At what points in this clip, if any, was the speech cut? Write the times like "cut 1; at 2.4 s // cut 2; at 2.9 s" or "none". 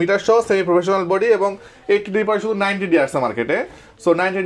none